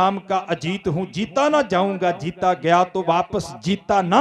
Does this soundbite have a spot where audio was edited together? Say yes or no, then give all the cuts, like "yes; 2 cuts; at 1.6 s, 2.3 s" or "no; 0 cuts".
no; 0 cuts